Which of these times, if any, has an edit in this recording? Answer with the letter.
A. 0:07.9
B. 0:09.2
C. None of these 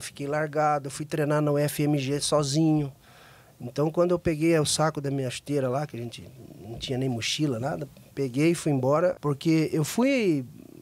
B